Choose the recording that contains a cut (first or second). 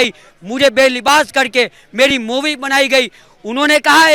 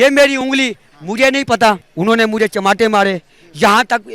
second